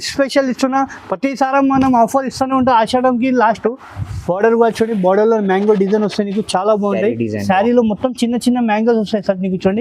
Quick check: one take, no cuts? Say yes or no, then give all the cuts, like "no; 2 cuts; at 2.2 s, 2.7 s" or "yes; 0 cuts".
no; 1 cut; at 3.6 s